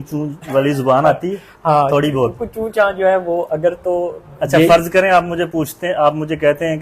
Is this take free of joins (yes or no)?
yes